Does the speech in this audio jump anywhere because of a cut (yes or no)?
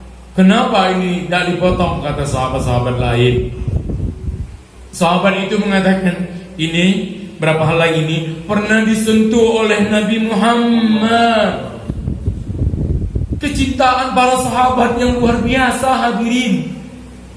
no